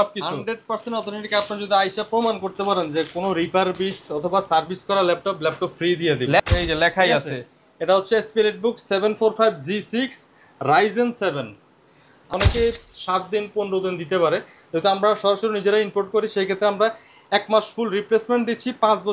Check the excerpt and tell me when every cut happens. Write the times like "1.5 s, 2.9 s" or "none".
6.4 s, 12.3 s

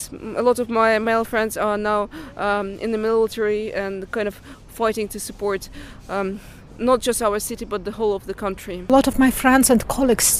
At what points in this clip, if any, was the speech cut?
8.9 s

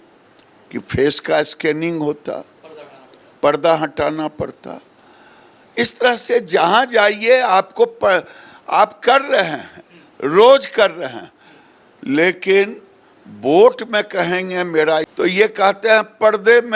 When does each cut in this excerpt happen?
15.1 s

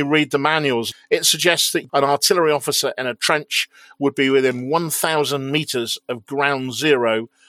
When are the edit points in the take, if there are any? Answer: 0.9 s, 1.8 s

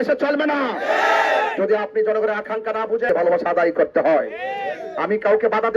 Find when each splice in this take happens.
3.1 s

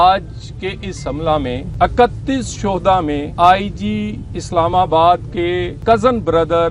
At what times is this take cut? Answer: 1.7 s, 3.3 s, 5.7 s

